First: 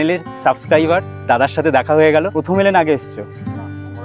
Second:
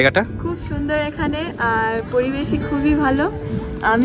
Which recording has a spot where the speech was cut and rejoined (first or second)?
first